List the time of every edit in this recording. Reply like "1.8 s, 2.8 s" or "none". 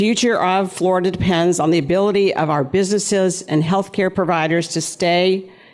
4.1 s